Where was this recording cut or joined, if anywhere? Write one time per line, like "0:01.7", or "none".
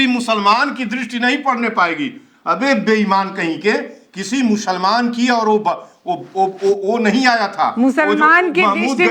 none